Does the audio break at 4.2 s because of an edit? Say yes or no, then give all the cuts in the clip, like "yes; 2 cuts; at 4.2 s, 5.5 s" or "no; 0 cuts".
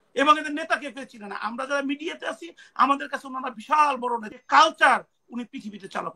yes; 1 cut; at 4.2 s